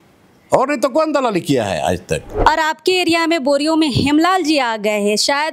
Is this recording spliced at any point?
yes; 1 cut; at 2.3 s

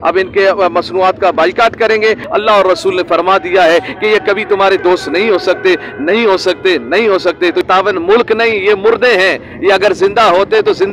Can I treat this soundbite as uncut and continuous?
no; 2 cuts; at 2.2 s, 7.6 s

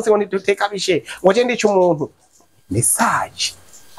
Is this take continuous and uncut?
yes; 0 cuts

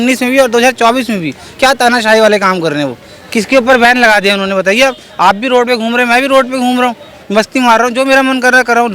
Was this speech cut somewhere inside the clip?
yes; 1 cut; at 7.1 s

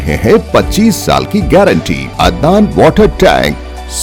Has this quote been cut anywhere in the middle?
yes; 1 cut; at 2.0 s

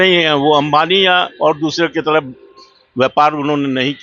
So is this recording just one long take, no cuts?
yes; 0 cuts

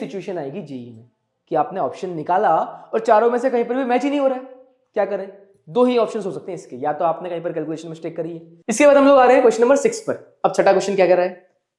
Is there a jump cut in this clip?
yes; 1 cut; at 8.5 s

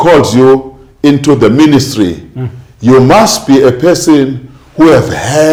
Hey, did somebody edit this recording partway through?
no; 0 cuts

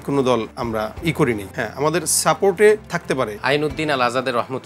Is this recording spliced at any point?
yes; 3 cuts; at 0.8 s, 1.5 s, 3.0 s

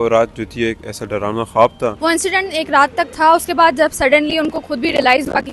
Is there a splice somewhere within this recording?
yes; 2 cuts; at 2.0 s, 3.1 s

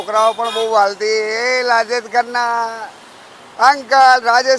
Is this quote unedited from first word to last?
yes; 0 cuts

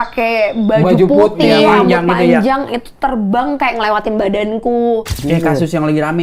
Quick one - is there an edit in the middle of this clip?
yes; 1 cut; at 5.2 s

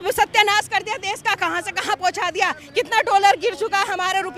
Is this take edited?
no; 0 cuts

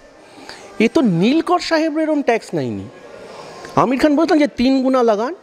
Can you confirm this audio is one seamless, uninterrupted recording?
yes; 0 cuts

